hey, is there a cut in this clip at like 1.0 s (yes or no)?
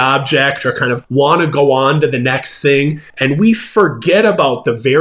yes